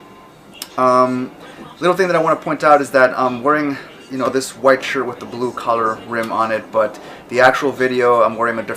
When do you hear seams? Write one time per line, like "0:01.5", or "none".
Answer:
none

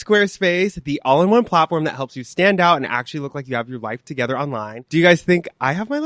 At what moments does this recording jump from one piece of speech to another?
0:04.8

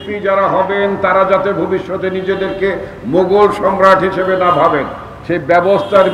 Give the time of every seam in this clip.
none

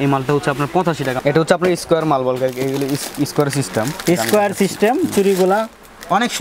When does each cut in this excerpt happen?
0:01.2

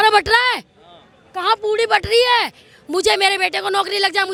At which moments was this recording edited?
none

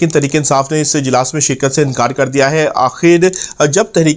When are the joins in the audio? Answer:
none

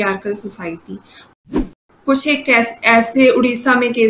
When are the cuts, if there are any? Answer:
0:01.4

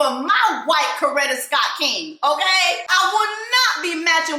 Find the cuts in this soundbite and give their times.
0:02.9

